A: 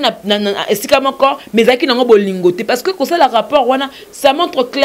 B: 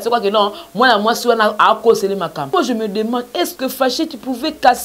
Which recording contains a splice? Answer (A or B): B